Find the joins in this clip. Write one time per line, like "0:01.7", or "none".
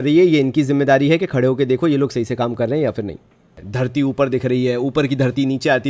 0:03.5